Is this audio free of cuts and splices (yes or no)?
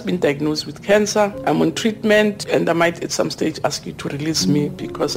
no